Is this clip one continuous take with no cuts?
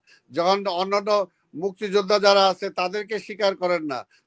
yes; 0 cuts

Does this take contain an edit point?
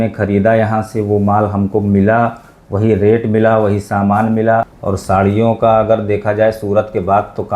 yes; 1 cut; at 4.8 s

